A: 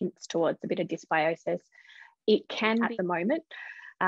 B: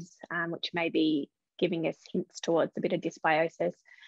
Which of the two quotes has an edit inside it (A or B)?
A